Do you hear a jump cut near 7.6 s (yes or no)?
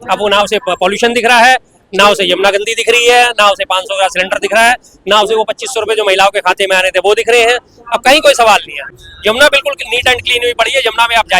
no